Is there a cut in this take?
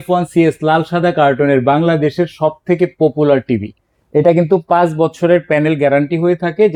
no; 0 cuts

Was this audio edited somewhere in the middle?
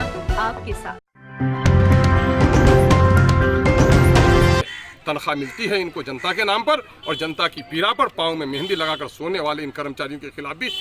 yes; 1 cut; at 4.8 s

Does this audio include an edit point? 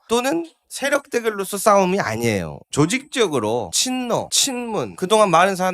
yes; 1 cut; at 2.6 s

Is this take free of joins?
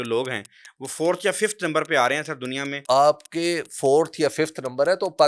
no; 1 cut; at 2.7 s

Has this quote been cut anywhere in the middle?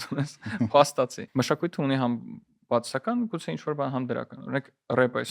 yes; 1 cut; at 1.2 s

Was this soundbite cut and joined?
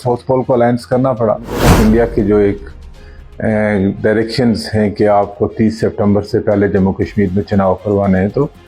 yes; 1 cut; at 1.7 s

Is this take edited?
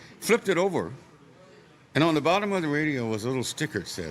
no; 0 cuts

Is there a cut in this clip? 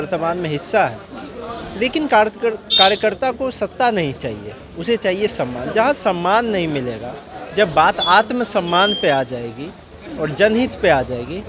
no; 0 cuts

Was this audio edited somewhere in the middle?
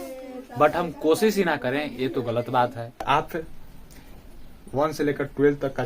yes; 1 cut; at 3.0 s

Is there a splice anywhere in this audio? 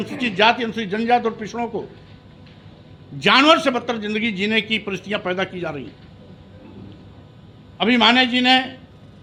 no; 0 cuts

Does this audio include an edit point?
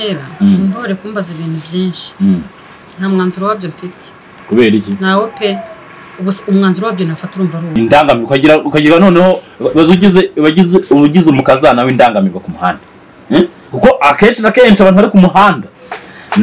yes; 1 cut; at 7.6 s

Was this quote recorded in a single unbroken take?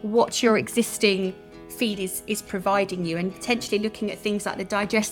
yes; 0 cuts

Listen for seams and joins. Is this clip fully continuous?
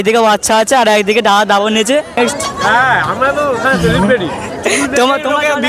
no; 1 cut; at 2.2 s

